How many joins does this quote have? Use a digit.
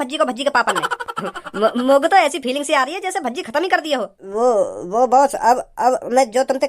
1